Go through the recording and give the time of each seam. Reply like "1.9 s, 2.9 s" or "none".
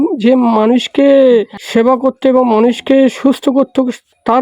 1.6 s